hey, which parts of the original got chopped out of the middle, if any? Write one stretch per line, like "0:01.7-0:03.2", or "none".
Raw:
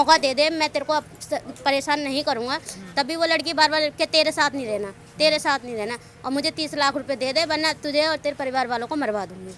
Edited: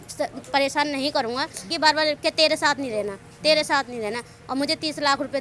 0:02.8-0:03.5